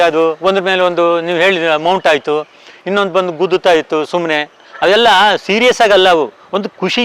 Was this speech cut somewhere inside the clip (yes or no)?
no